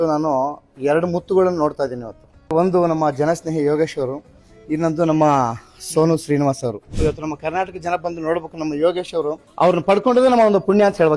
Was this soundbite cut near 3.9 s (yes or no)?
no